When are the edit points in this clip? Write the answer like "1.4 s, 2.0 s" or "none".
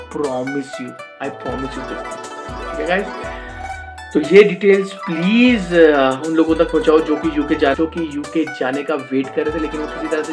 none

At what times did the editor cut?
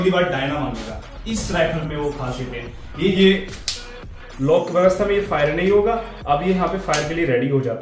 3.0 s

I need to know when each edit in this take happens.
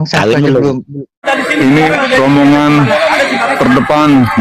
1.2 s

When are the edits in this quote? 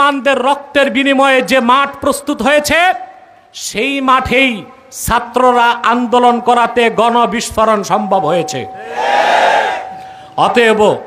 none

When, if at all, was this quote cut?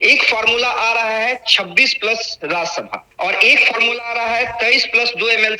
3.0 s

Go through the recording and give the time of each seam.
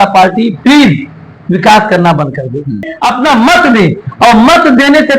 2.8 s

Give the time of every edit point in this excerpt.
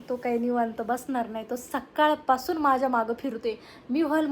none

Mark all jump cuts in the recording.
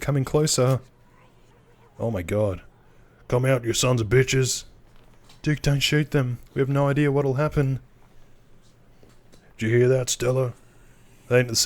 none

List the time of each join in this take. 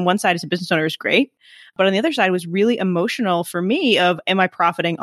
none

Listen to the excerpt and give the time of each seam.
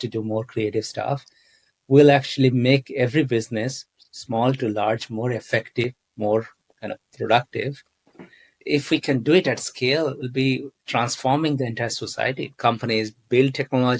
8.6 s, 12.5 s

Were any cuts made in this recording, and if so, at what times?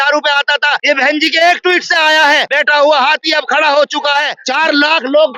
0.8 s, 2.5 s, 4.4 s

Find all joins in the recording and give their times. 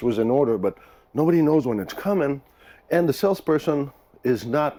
none

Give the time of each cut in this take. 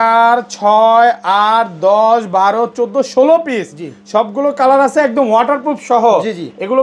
none

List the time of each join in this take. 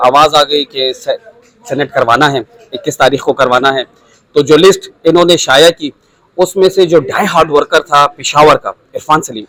none

